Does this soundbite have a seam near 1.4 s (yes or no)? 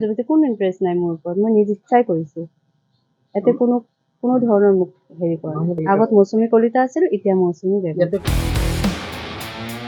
no